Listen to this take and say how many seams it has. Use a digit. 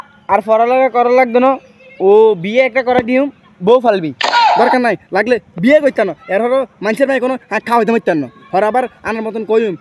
1